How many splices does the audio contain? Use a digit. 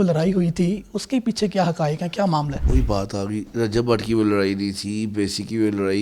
1